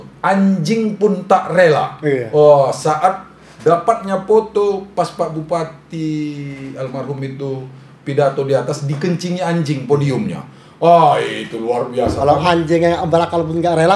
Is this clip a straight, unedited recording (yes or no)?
yes